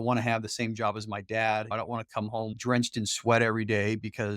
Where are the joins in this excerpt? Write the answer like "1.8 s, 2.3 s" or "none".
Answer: 2.5 s

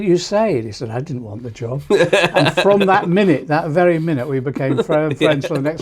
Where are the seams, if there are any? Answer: none

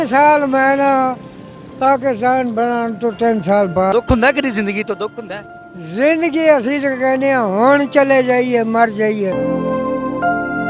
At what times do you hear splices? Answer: 3.9 s, 9.3 s

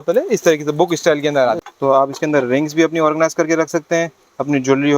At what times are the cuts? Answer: 1.6 s

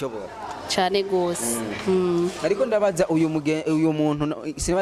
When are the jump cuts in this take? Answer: none

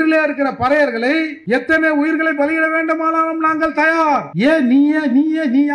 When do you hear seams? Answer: 1.4 s, 4.3 s

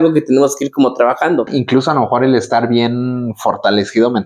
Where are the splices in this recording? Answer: 1.5 s

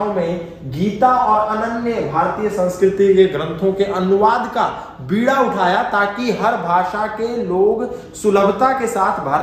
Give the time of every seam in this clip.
none

